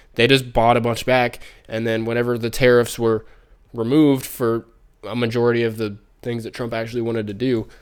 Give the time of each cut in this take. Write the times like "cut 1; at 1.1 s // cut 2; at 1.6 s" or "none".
none